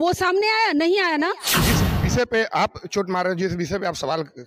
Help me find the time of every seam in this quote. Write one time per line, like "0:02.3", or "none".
0:01.6